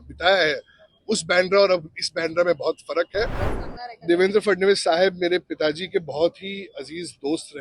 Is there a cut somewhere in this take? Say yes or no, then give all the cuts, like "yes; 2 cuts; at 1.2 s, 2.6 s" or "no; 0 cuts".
yes; 1 cut; at 3.4 s